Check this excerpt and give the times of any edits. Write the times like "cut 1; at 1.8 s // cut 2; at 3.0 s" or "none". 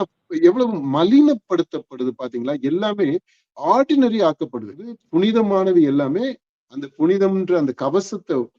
cut 1; at 4.9 s